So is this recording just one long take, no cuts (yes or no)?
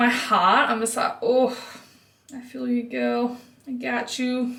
yes